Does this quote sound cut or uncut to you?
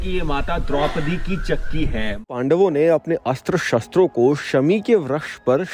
cut